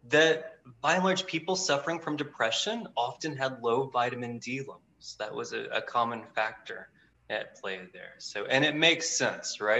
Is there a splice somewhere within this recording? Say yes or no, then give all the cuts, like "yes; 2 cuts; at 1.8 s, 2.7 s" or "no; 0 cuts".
no; 0 cuts